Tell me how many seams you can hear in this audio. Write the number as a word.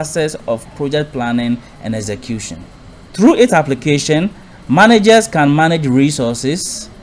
one